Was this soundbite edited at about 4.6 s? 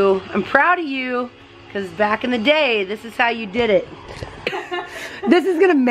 yes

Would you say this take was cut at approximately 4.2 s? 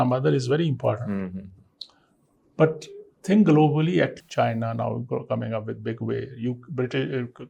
yes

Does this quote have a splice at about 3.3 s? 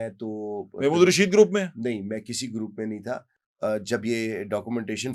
no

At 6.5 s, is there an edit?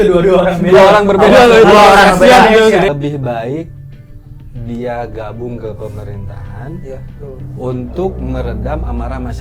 no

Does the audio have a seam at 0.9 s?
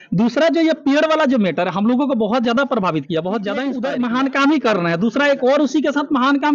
no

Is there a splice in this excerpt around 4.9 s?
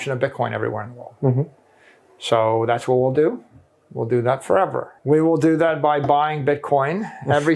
yes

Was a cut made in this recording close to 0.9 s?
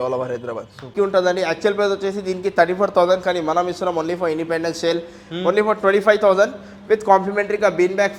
yes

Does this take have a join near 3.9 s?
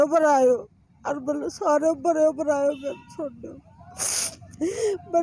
no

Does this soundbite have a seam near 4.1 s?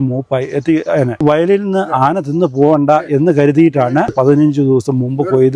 yes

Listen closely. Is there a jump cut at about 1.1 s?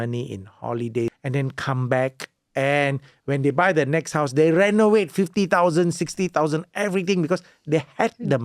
yes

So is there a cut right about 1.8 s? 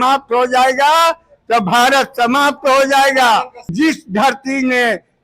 no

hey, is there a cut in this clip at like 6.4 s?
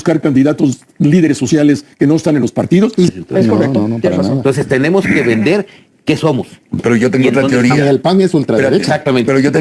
no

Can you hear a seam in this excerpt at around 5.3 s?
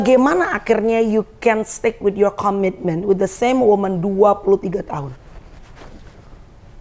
no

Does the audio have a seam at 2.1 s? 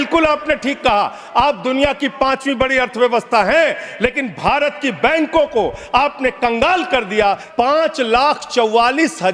no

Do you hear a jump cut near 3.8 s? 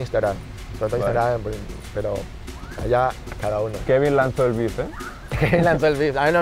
yes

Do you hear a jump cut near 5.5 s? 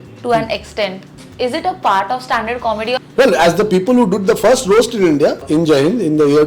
yes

